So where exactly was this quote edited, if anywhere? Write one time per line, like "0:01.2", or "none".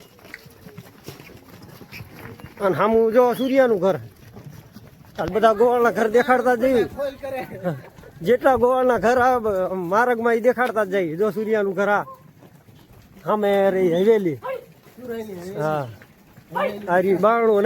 none